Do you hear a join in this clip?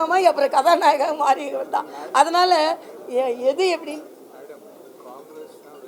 no; 0 cuts

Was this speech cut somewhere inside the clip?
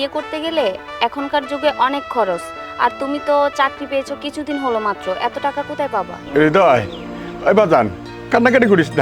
yes; 1 cut; at 6.2 s

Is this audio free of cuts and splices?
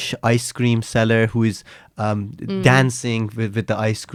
yes; 0 cuts

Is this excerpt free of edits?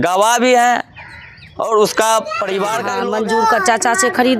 no; 1 cut; at 2.9 s

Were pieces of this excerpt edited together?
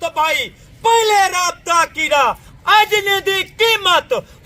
yes; 1 cut; at 2.4 s

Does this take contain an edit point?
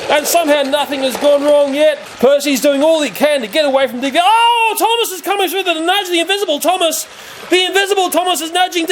yes; 1 cut; at 2.0 s

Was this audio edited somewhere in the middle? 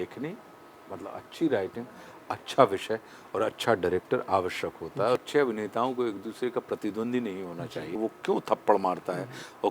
yes; 2 cuts; at 5.2 s, 8.0 s

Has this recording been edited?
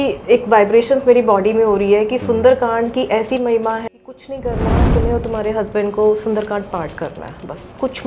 yes; 1 cut; at 3.8 s

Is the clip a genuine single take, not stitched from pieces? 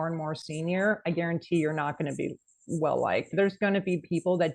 no; 1 cut; at 3.3 s

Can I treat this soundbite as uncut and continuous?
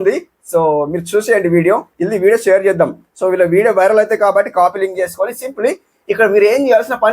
no; 1 cut; at 1.9 s

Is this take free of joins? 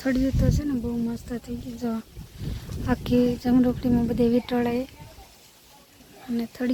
yes; 0 cuts

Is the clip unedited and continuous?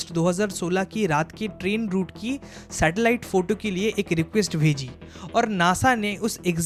yes; 0 cuts

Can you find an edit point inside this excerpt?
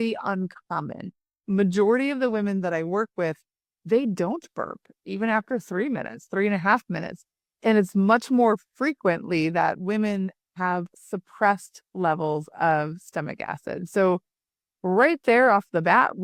no; 0 cuts

